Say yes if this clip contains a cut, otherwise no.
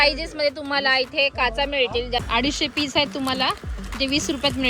yes